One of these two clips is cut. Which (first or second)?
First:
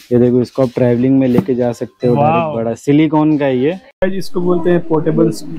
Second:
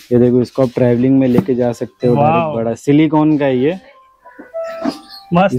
first